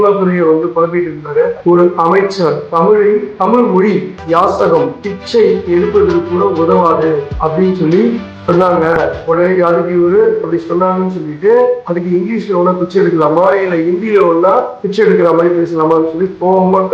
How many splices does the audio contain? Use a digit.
1